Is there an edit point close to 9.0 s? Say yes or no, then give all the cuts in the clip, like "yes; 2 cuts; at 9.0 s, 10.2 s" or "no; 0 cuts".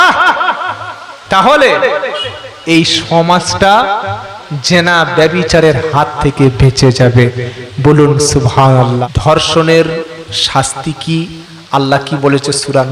yes; 1 cut; at 9.0 s